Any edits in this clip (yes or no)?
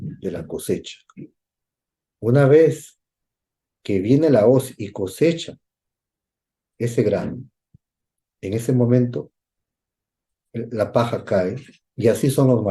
no